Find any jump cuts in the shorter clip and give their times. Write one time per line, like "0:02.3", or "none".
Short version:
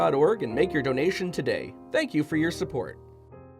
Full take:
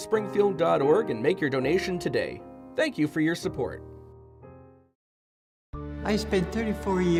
0:01.7
0:02.9

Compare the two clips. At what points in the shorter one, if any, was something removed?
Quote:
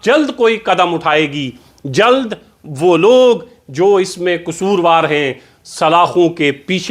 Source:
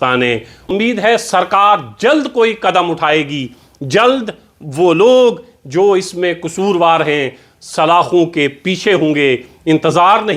none

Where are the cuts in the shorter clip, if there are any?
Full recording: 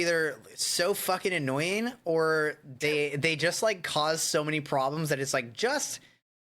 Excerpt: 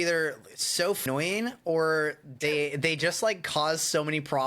0:01.0

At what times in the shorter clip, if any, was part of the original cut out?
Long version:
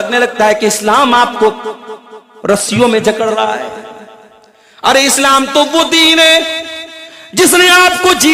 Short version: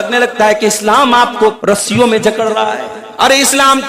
0:01.6
0:03.0

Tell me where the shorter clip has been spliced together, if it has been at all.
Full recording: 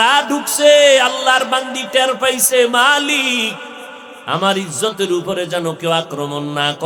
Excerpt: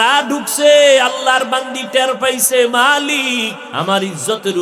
0:03.6

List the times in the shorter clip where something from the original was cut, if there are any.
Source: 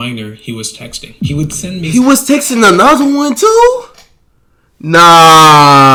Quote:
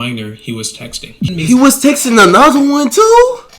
0:01.3

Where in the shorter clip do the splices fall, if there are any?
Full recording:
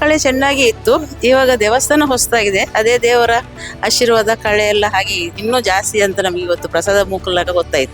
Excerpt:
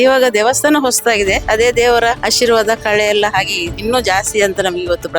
0:02.2

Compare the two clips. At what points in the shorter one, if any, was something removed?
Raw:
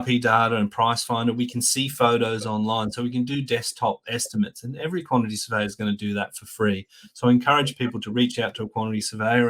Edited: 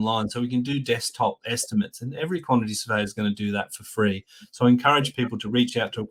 none

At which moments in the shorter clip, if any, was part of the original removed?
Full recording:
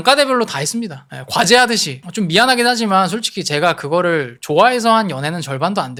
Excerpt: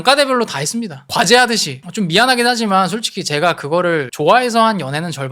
0:01.0
0:04.1

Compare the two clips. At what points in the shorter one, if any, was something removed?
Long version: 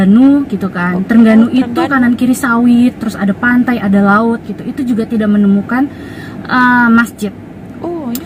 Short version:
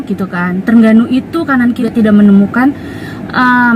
0:01.8

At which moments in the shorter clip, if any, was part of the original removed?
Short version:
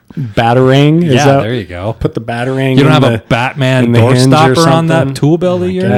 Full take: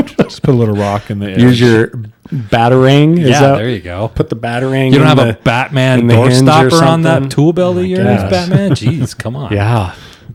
none

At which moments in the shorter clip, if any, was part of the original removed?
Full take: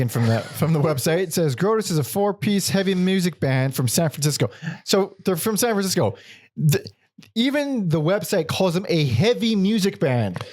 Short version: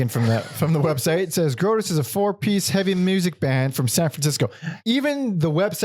0:04.7

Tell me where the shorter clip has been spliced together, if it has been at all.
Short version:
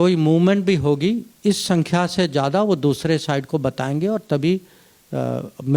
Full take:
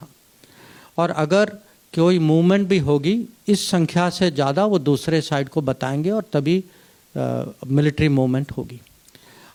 none

